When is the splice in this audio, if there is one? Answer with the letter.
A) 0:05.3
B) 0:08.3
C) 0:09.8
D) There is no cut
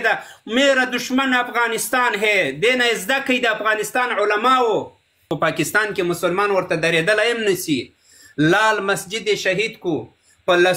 A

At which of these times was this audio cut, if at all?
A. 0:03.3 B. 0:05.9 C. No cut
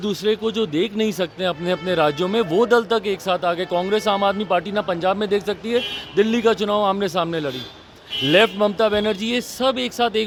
C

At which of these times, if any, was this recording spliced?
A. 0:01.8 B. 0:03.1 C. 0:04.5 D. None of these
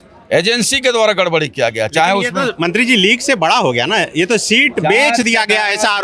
D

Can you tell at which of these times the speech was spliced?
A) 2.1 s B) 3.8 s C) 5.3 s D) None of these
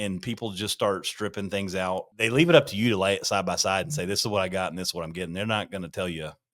A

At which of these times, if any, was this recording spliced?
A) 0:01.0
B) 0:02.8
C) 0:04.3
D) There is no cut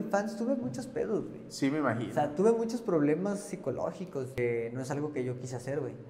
C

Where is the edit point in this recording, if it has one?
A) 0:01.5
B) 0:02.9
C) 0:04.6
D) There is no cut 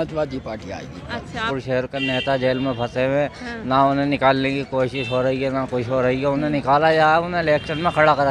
A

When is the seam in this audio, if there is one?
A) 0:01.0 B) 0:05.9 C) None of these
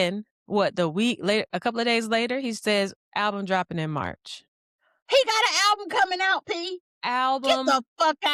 C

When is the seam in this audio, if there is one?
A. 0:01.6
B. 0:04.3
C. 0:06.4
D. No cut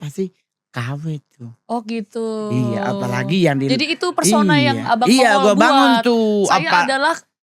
D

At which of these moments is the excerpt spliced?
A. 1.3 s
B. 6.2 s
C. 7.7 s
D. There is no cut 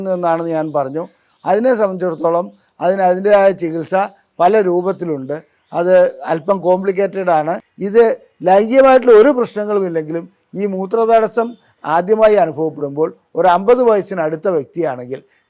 C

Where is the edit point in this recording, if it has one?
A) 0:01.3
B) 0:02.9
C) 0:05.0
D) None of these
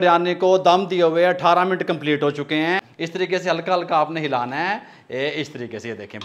B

